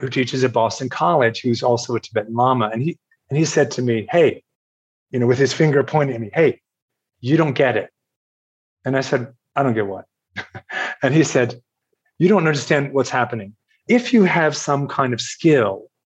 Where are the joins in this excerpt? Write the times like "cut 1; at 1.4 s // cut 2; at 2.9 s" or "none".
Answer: cut 1; at 7.1 s // cut 2; at 13.8 s